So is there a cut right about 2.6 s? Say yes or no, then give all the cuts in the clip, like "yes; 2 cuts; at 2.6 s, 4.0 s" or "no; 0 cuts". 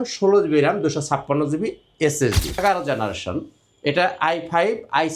yes; 1 cut; at 2.6 s